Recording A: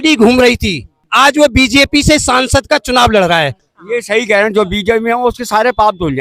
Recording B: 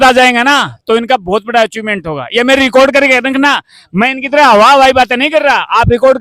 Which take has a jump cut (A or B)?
A